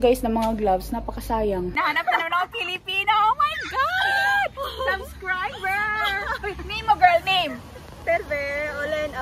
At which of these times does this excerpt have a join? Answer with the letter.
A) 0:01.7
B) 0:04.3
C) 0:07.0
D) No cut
A